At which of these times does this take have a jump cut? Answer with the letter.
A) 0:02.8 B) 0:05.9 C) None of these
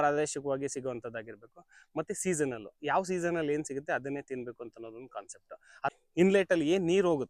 B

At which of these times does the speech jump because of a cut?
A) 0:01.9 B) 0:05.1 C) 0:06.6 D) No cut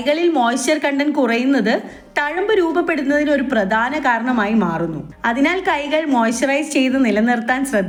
D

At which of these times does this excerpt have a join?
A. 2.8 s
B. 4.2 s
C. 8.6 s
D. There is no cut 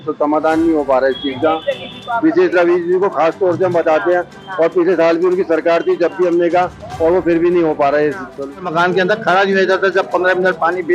C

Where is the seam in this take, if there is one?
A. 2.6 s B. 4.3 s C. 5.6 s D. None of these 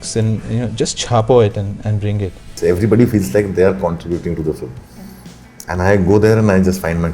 A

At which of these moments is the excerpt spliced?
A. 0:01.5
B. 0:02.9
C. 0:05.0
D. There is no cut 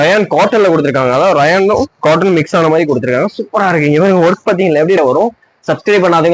C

